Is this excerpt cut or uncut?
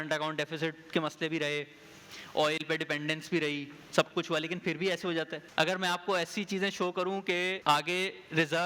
cut